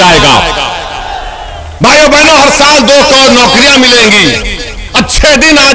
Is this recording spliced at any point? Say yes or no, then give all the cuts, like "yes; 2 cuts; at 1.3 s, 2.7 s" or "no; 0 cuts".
no; 0 cuts